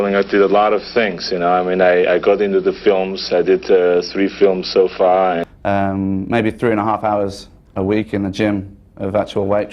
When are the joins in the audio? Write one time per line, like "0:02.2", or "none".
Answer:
0:05.5

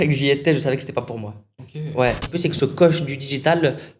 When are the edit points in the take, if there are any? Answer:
0:02.2

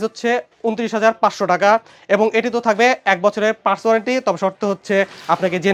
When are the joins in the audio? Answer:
none

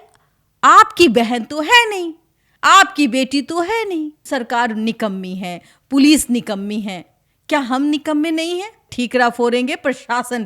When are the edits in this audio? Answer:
0:04.2
0:08.8

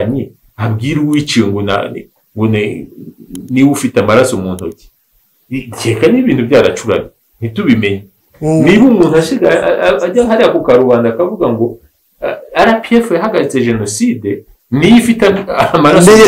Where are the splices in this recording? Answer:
none

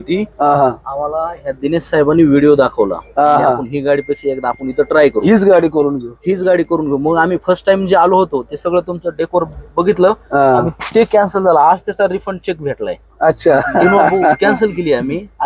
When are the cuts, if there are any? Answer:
none

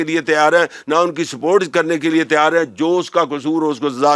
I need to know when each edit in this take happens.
none

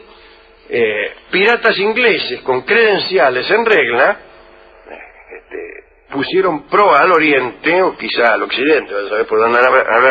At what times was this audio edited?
0:06.7

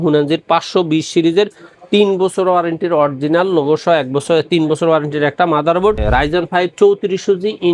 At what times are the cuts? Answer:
0:06.0

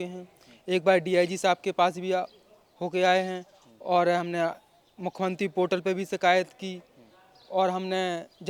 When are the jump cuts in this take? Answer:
none

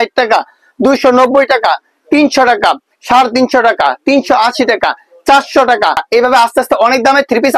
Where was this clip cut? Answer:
0:06.0

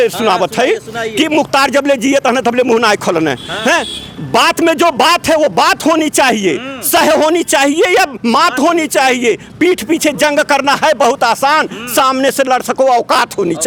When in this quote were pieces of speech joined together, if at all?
none

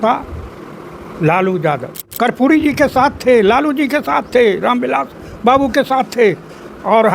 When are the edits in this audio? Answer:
0:02.0

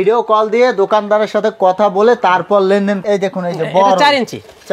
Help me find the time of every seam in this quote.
0:03.0

